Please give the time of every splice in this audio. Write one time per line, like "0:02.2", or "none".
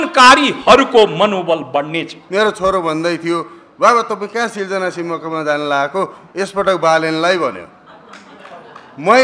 0:02.1

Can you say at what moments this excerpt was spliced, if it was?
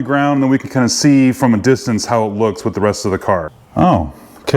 0:03.6

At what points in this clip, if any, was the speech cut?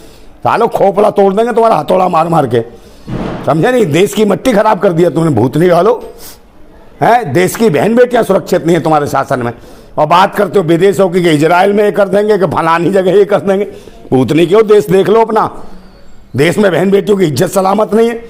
none

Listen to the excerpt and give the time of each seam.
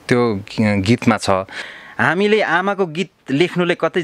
0:01.7

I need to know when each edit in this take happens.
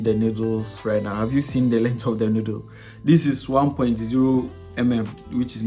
none

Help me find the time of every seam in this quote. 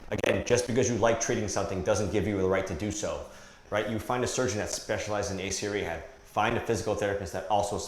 0:03.5

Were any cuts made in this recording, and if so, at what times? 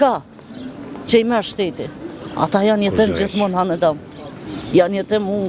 none

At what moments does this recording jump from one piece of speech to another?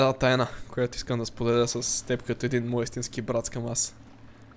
none

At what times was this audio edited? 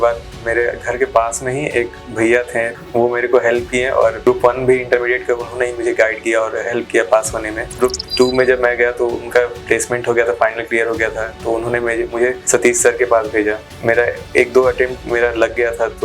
0:02.7
0:04.2
0:07.7
0:12.4
0:13.7

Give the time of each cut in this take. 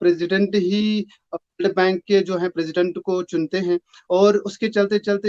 none

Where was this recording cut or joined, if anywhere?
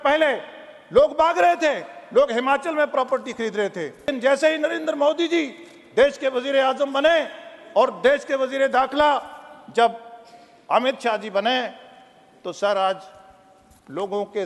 0:04.1

